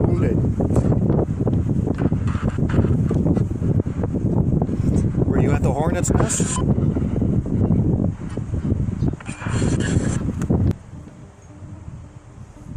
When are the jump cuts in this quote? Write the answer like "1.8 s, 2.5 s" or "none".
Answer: 10.7 s